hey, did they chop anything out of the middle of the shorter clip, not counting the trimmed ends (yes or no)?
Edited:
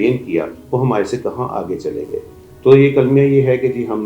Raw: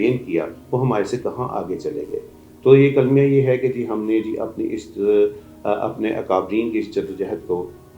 no